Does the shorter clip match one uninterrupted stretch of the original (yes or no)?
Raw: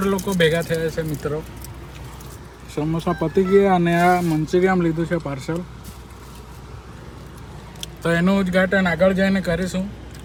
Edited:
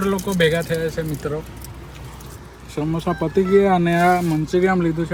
yes